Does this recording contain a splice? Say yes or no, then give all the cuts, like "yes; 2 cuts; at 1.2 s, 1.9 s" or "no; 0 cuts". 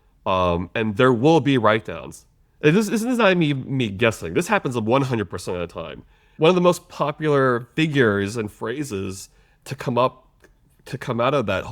yes; 1 cut; at 6.3 s